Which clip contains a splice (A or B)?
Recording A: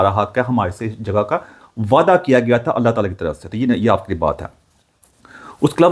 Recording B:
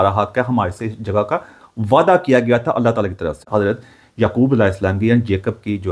B